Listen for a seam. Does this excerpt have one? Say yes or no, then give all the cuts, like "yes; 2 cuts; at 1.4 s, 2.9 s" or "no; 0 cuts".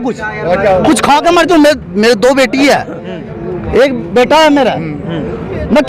no; 0 cuts